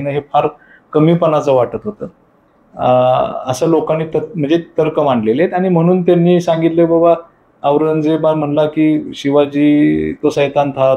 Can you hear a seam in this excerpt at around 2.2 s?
no; 0 cuts

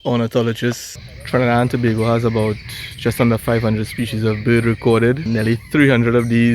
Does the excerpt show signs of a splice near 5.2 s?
yes; 2 cuts; at 0.9 s, 5.2 s

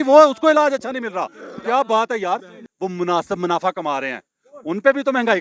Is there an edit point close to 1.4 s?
no; 1 cut; at 2.6 s

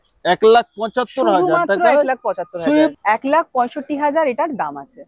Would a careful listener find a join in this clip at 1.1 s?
no; 1 cut; at 3.0 s

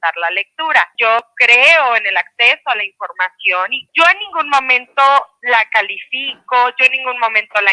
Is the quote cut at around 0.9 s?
yes; 2 cuts; at 0.9 s, 3.8 s

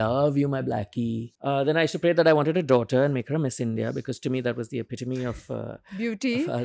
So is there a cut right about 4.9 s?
no; 1 cut; at 1.3 s

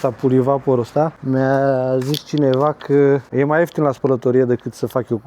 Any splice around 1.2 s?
yes; 2 cuts; at 1.2 s, 3.3 s

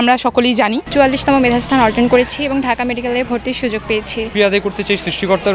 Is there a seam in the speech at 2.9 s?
no; 2 cuts; at 0.8 s, 4.3 s

